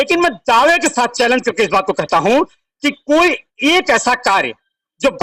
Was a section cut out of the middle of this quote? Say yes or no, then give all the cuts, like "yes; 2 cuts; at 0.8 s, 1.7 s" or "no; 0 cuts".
no; 0 cuts